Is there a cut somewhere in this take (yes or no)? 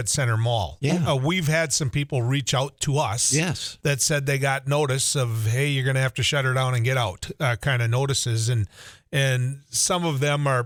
no